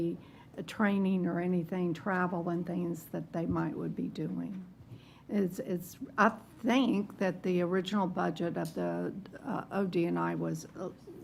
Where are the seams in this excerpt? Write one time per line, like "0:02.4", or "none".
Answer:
none